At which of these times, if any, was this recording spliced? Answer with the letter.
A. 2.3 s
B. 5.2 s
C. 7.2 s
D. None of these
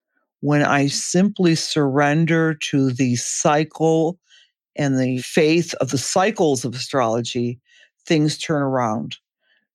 B